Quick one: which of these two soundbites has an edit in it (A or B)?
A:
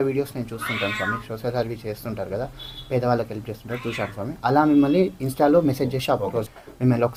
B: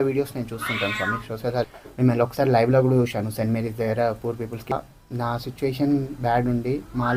B